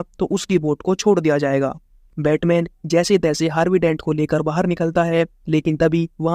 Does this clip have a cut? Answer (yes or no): yes